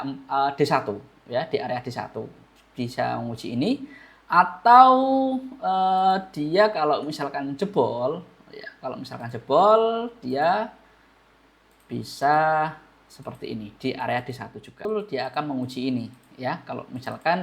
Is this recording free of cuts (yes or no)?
no